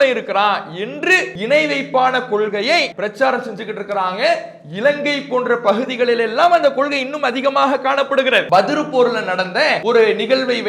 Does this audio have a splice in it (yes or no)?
yes